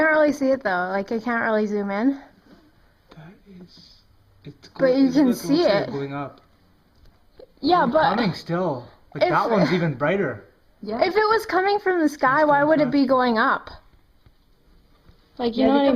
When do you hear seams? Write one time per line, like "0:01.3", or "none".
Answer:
0:03.6

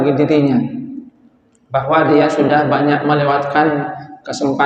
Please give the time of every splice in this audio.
none

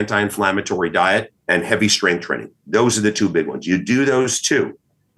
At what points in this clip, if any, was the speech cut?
0:01.4

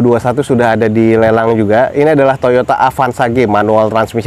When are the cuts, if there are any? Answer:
none

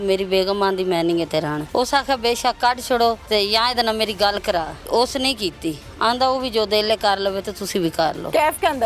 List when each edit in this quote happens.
0:01.6
0:03.2
0:04.8

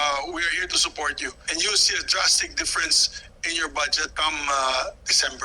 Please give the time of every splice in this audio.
0:01.4
0:04.0

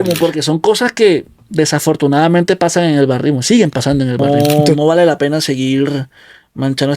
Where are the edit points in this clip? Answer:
0:04.2

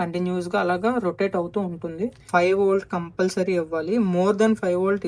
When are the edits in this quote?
0:02.2

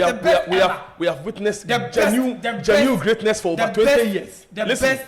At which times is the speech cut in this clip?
none

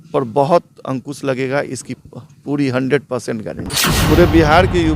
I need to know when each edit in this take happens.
0:03.6

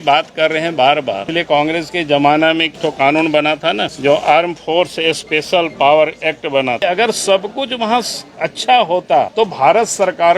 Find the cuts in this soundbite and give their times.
0:01.2
0:02.7
0:03.9
0:06.8
0:09.3

